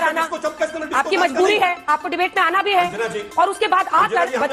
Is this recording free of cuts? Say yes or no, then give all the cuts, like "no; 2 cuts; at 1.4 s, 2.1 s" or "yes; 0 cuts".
yes; 0 cuts